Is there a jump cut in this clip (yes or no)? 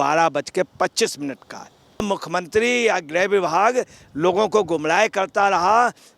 yes